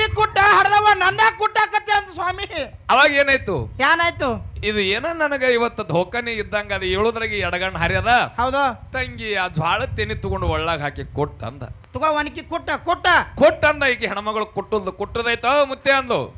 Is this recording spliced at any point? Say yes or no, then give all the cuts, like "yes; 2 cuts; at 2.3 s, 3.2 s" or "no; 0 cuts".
no; 0 cuts